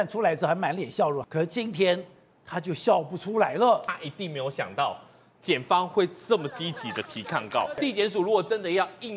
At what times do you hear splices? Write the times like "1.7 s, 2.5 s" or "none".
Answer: 1.2 s, 3.9 s, 7.8 s